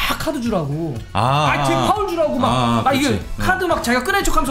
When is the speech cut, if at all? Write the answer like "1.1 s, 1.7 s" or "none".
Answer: none